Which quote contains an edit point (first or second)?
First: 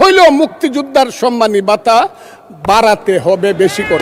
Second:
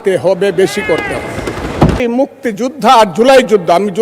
second